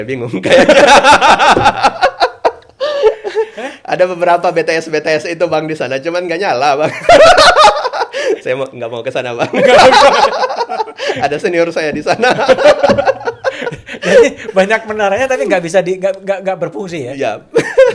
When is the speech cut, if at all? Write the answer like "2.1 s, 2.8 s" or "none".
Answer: none